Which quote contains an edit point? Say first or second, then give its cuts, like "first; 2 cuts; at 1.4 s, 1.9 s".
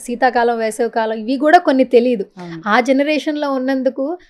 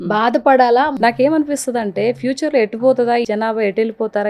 second; 2 cuts; at 0.9 s, 3.3 s